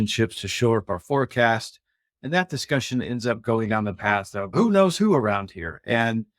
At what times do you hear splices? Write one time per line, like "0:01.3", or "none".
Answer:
0:04.5